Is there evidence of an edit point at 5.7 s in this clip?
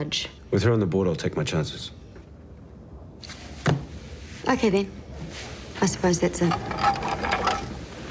no; 1 cut; at 1.2 s

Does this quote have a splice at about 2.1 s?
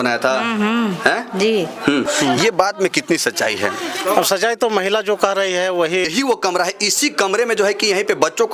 yes; 2 cuts; at 2.1 s, 6.1 s

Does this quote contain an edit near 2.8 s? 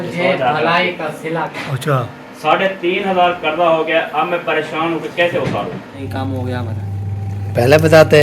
no; 2 cuts; at 1.5 s, 6.0 s

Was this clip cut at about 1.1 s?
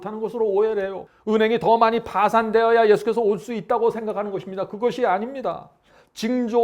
yes; 1 cut; at 1.1 s

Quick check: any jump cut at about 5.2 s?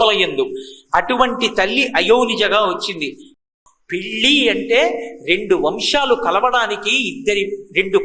no; 1 cut; at 3.5 s

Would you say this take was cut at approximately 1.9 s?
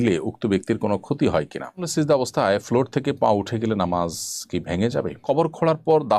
yes; 2 cuts; at 1.9 s, 5.2 s

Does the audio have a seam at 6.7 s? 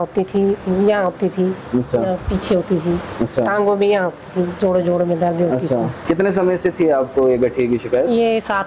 no; 0 cuts

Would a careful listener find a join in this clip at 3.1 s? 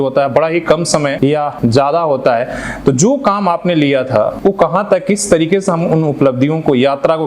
no; 2 cuts; at 1.4 s, 4.3 s

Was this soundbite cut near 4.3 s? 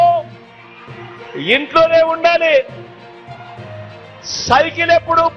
yes; 2 cuts; at 2.7 s, 4.3 s

